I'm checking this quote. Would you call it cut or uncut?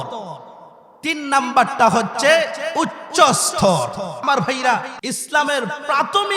cut